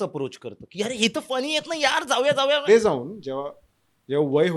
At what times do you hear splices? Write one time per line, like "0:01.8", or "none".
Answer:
0:02.7